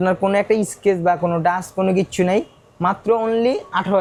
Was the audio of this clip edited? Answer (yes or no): no